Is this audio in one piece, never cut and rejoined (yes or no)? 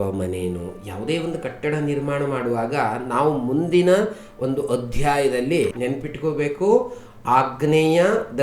no